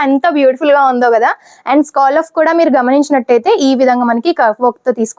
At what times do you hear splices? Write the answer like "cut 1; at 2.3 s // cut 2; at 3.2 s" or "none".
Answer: none